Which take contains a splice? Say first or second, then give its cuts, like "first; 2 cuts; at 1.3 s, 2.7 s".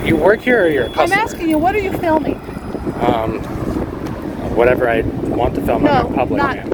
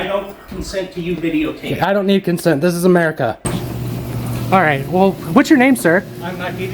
second; 1 cut; at 3.5 s